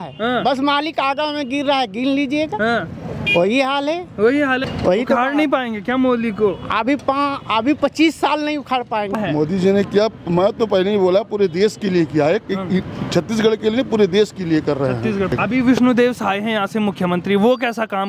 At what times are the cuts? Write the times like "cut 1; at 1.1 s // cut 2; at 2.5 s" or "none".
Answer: cut 1; at 4.7 s // cut 2; at 9.1 s // cut 3; at 15.3 s

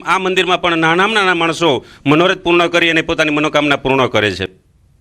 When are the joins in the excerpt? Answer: cut 1; at 2.9 s

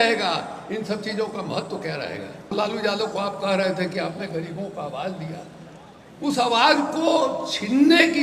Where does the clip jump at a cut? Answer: cut 1; at 2.5 s

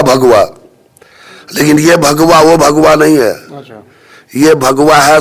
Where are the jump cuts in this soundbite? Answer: none

